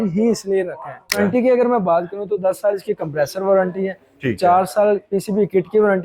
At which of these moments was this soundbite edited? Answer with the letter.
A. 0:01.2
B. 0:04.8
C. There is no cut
A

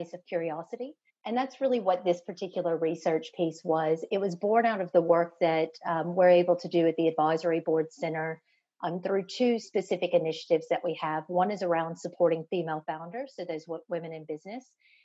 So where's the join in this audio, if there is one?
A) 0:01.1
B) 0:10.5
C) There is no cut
A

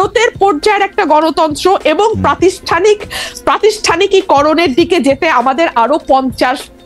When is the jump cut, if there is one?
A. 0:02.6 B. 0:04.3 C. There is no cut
C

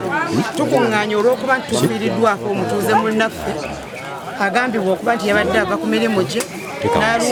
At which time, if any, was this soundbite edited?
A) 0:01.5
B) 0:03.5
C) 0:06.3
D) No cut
D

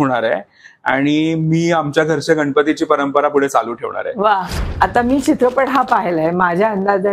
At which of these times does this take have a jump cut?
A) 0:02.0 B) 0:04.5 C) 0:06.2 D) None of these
B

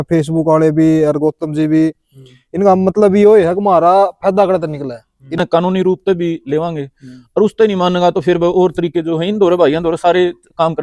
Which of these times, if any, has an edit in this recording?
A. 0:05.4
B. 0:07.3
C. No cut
A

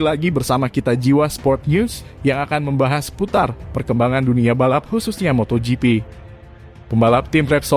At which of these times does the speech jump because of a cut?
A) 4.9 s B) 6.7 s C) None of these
B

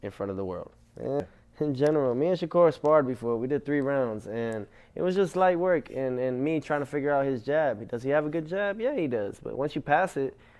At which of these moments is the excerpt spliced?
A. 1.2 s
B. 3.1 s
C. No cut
A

